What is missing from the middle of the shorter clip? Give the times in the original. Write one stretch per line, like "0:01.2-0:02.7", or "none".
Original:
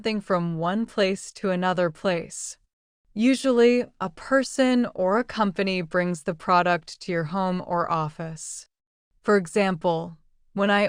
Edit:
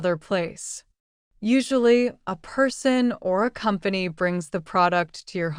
none